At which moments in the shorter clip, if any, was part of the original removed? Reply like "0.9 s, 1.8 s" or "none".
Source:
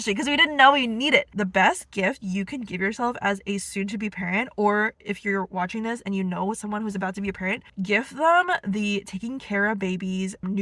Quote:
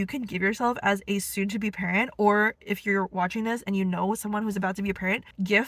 none